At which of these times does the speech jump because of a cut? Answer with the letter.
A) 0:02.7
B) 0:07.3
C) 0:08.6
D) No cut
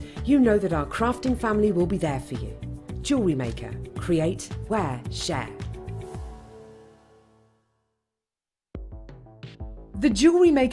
C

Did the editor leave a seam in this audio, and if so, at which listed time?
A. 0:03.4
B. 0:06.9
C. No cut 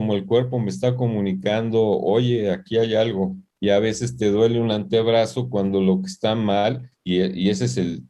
A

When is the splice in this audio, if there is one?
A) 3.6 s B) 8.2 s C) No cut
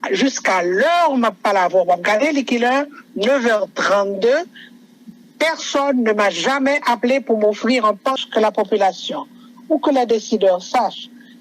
B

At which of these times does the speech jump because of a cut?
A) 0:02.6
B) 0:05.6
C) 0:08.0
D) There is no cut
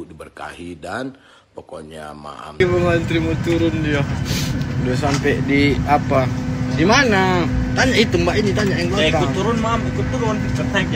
A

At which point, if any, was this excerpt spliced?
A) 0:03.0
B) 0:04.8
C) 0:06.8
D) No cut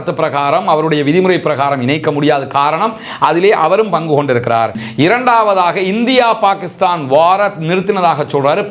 B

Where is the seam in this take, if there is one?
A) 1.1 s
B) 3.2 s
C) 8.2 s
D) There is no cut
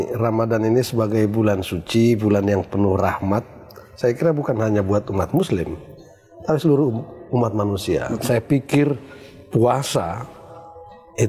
C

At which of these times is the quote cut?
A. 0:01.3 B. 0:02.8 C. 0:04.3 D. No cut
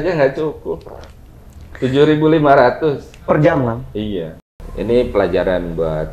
C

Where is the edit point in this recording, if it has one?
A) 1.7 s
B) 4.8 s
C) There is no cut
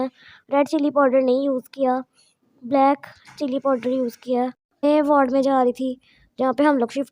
B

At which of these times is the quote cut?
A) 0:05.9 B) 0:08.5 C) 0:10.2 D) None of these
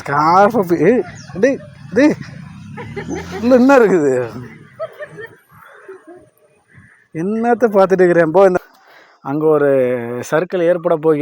B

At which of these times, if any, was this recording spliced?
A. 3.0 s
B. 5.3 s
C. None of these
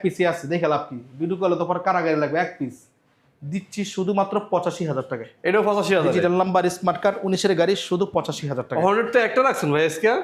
C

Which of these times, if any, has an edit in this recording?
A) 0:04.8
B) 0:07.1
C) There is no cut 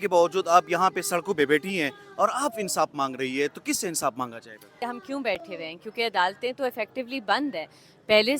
A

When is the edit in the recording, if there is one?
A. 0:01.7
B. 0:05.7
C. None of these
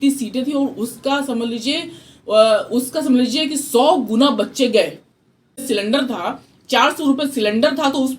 B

